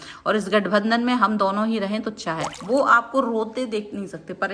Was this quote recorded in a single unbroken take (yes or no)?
no